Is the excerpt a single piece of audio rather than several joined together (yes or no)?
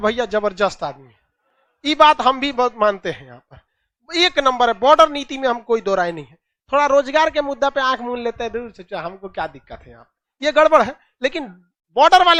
yes